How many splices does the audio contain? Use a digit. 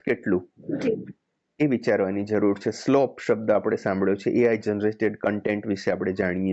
0